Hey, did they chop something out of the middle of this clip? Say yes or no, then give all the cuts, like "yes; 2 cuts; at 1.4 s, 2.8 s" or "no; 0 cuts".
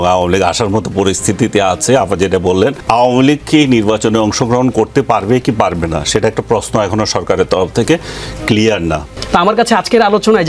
yes; 2 cuts; at 2.8 s, 9.1 s